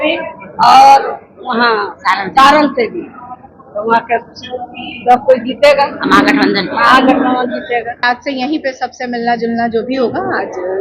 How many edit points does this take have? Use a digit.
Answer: 1